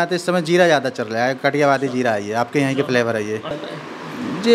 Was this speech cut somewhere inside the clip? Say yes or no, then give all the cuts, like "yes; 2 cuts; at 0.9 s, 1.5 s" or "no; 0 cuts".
yes; 1 cut; at 3.5 s